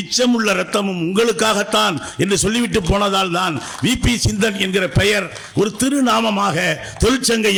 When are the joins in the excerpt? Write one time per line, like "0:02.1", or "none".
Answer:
none

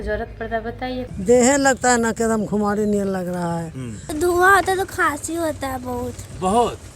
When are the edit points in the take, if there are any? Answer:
0:01.1
0:04.1

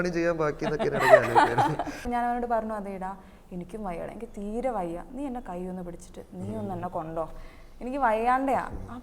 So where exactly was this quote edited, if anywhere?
0:02.1

